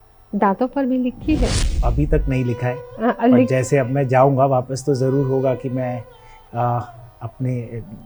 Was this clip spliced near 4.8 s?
no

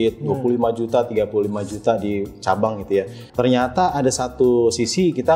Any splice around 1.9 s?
no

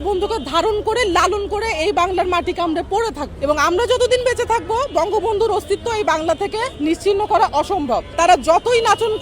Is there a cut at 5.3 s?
no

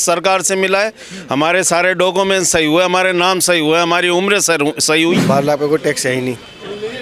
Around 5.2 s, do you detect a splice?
yes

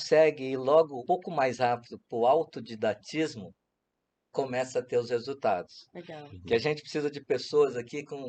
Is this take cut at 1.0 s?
yes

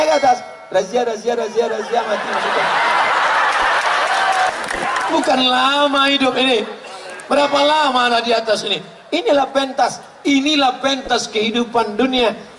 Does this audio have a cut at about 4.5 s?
yes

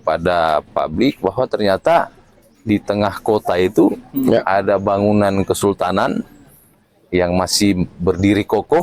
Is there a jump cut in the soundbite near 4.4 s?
no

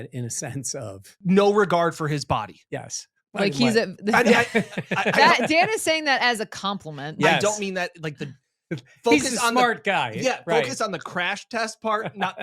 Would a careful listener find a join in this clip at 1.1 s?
yes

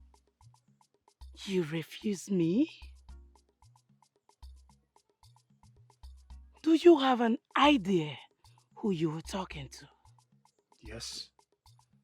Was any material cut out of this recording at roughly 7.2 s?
no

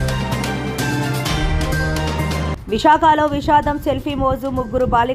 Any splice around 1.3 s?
no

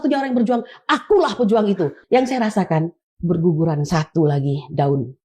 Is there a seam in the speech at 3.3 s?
no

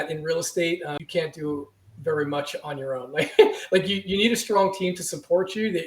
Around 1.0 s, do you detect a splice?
yes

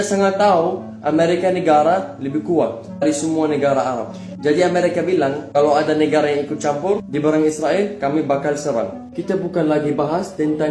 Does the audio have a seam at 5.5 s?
no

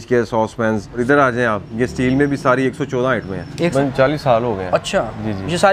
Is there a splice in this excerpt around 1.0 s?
yes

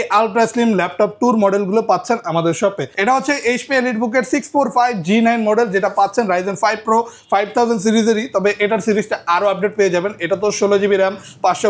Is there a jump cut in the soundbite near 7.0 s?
no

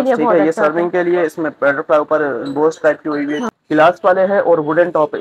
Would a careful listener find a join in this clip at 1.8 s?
no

